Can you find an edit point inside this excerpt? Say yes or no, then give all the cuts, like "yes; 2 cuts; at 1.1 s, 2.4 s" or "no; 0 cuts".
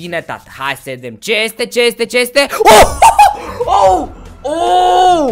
no; 0 cuts